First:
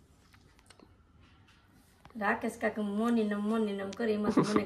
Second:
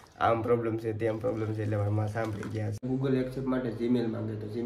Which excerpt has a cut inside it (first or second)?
second